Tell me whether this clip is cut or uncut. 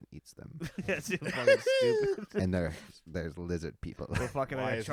uncut